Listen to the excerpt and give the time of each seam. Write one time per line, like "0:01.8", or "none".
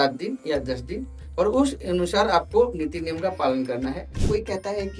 0:04.1